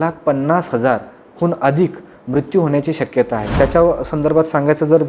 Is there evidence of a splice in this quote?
yes; 1 cut; at 3.5 s

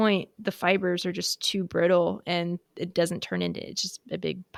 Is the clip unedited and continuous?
yes; 0 cuts

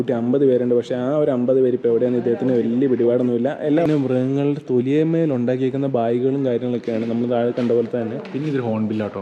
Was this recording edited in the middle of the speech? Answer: yes; 1 cut; at 3.9 s

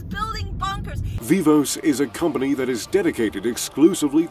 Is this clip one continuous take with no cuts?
no; 1 cut; at 1.2 s

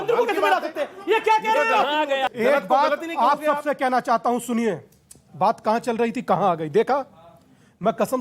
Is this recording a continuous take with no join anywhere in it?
no; 1 cut; at 2.3 s

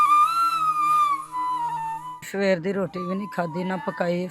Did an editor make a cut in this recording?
yes; 1 cut; at 2.2 s

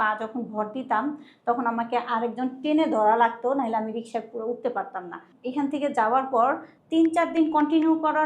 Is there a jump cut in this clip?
yes; 2 cuts; at 5.3 s, 6.7 s

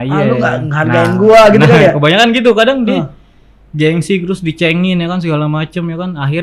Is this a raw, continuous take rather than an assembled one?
yes; 0 cuts

